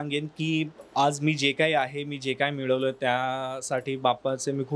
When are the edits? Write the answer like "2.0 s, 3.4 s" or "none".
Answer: none